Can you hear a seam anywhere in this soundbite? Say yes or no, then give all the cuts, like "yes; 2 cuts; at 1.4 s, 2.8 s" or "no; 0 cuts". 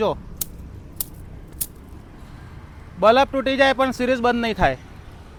no; 0 cuts